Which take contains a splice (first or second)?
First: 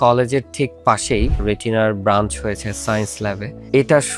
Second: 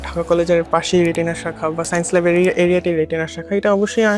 first